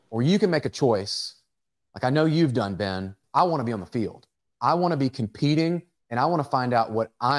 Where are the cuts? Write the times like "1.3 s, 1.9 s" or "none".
3.2 s